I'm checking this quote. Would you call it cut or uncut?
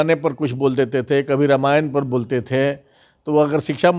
uncut